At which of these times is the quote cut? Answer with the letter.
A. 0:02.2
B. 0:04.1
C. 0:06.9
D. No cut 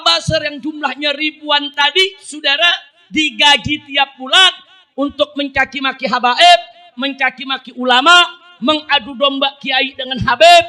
D